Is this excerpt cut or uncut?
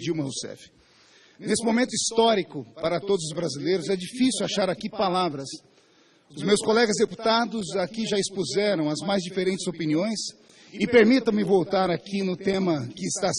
uncut